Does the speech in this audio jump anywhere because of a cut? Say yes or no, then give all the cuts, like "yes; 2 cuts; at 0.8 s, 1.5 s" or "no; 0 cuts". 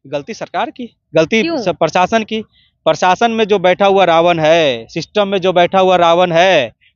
no; 0 cuts